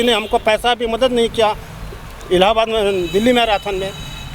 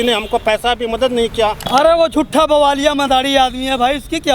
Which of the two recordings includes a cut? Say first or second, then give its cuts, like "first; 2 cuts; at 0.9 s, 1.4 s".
second; 1 cut; at 1.6 s